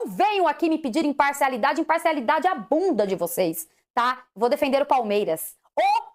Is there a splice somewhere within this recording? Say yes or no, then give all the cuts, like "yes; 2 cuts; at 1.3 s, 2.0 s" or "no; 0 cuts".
no; 0 cuts